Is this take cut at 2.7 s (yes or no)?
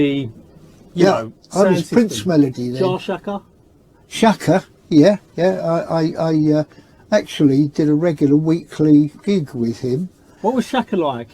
yes